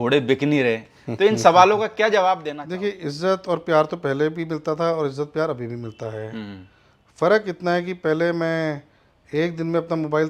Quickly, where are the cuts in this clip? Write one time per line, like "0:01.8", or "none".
0:02.5